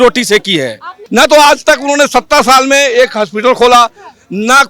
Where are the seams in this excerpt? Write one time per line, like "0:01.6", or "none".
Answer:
0:01.0